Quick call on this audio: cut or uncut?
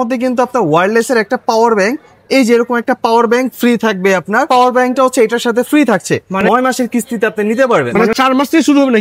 cut